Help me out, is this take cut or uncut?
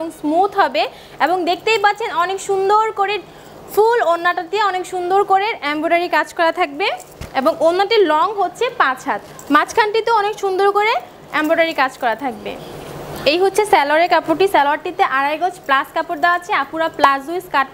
uncut